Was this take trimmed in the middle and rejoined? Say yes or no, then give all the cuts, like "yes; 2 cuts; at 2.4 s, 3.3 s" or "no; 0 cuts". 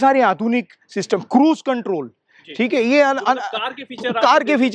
no; 0 cuts